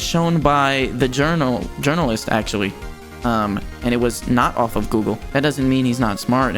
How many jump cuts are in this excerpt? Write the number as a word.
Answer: one